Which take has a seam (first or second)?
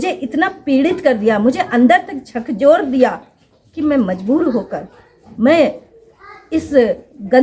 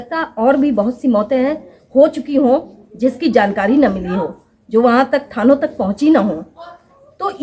first